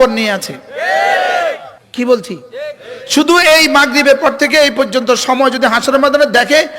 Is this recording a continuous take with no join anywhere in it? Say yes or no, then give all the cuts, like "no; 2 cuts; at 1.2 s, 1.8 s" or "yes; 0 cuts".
no; 1 cut; at 1.7 s